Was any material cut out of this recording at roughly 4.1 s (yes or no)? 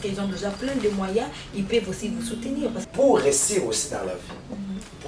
no